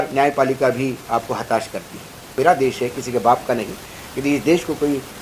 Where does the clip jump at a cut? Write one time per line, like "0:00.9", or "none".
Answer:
0:02.3